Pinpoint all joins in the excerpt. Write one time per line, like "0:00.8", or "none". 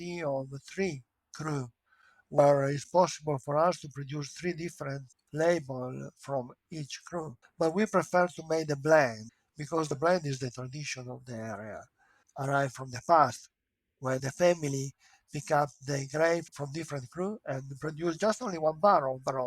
0:07.4
0:16.5